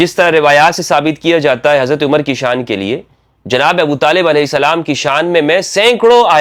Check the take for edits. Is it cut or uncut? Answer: uncut